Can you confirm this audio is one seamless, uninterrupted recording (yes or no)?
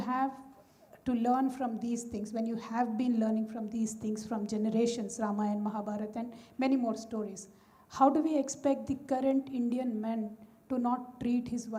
yes